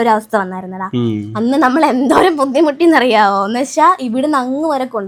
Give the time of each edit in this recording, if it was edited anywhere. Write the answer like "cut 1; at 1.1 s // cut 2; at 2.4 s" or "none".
none